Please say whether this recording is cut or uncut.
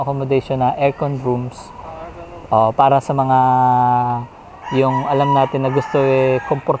uncut